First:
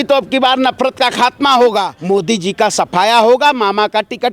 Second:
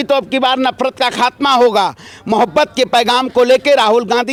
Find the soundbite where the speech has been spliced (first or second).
first